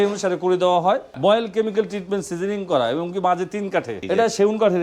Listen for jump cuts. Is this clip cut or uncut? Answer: cut